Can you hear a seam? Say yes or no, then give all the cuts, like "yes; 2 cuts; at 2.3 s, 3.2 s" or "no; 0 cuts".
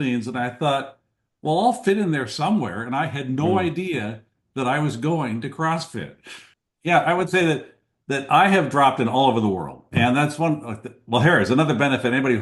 yes; 1 cut; at 6.5 s